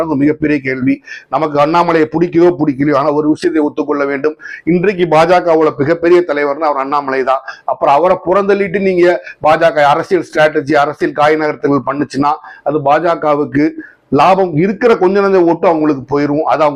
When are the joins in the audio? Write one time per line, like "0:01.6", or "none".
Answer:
none